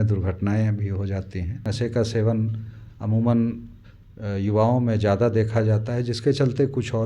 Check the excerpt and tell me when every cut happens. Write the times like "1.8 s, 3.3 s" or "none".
1.7 s